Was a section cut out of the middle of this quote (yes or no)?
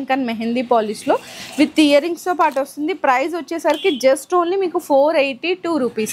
no